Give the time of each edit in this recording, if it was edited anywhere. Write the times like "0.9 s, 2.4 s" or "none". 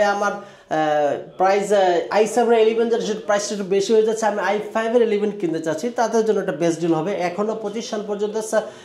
none